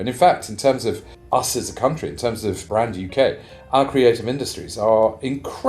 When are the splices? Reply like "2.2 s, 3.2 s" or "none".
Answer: 1.1 s, 2.6 s